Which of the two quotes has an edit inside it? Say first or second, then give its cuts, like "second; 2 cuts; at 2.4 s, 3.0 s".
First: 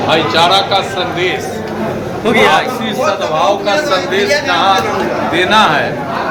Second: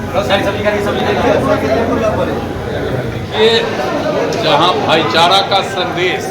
second; 1 cut; at 3.2 s